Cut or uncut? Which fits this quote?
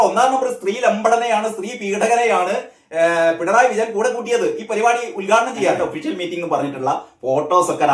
cut